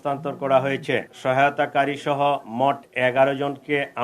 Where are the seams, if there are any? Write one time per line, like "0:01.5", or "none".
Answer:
0:01.1